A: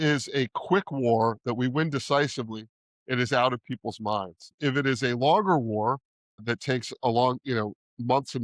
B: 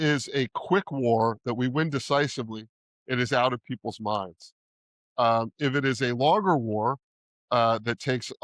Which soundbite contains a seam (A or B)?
A